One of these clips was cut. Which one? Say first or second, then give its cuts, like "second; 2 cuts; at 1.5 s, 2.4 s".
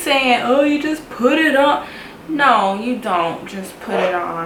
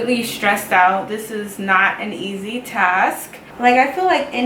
second; 1 cut; at 3.4 s